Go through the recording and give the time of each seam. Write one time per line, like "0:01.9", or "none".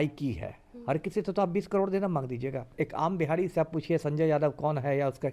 0:02.7

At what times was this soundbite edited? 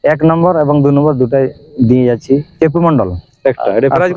0:02.5

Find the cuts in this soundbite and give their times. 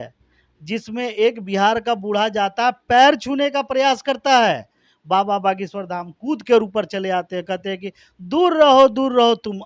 none

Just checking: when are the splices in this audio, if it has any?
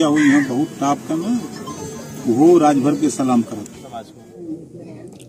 0:03.8

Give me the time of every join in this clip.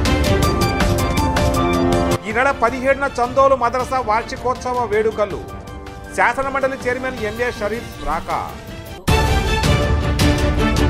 none

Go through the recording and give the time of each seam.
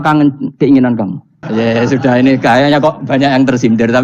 0:01.4

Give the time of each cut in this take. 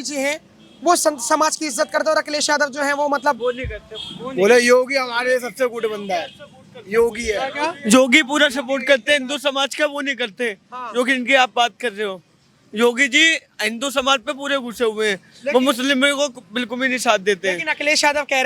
none

